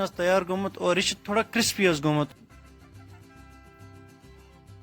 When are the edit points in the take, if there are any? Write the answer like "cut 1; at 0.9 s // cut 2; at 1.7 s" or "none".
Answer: cut 1; at 2.4 s